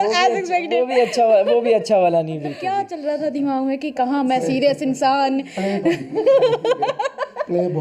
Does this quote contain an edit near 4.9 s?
no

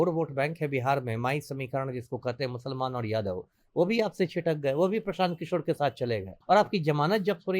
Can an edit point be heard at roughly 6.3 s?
yes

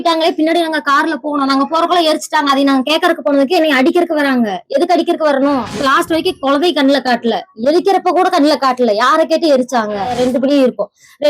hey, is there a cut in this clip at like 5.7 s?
yes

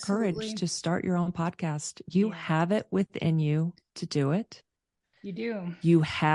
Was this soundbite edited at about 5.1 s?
no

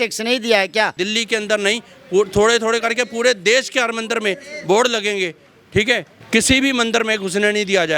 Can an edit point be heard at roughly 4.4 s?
no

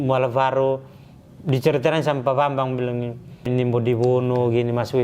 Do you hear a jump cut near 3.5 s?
yes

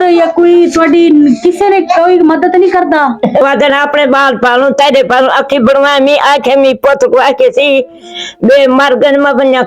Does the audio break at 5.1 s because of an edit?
no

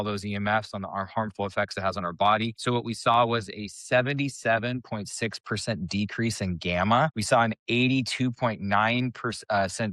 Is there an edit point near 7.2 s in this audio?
yes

